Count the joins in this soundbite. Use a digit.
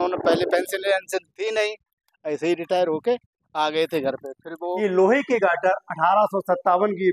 1